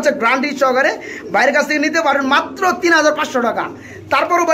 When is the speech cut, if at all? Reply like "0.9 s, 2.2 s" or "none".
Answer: none